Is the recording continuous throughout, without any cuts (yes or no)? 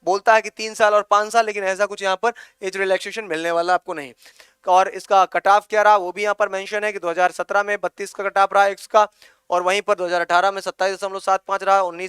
no